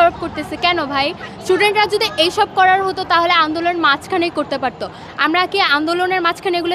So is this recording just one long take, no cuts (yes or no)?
yes